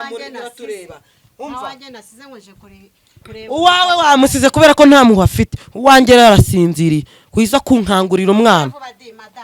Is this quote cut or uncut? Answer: uncut